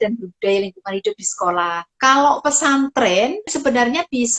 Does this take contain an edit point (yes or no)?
yes